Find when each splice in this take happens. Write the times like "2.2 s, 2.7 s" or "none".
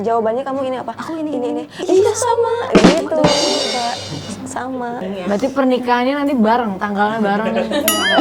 5.0 s